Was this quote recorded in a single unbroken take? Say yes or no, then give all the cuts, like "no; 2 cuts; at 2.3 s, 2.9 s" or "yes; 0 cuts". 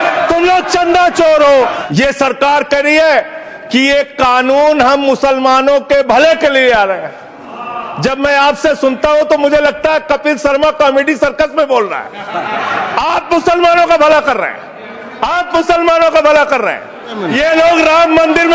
no; 2 cuts; at 1.8 s, 17.2 s